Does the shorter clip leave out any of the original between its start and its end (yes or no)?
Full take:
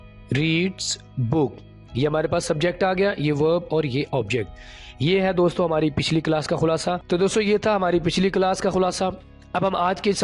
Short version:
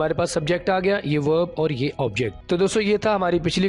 yes